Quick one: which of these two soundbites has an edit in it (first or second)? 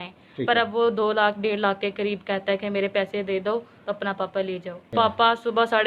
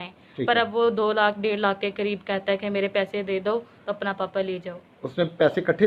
first